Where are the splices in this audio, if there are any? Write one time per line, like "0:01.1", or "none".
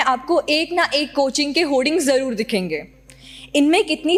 none